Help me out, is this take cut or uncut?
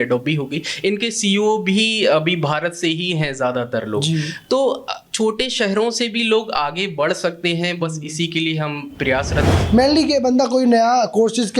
cut